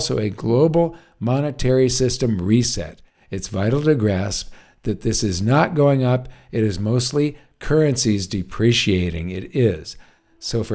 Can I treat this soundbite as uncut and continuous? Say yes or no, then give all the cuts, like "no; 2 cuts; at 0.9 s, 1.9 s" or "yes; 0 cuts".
yes; 0 cuts